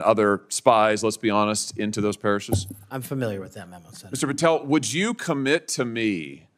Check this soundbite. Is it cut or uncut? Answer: uncut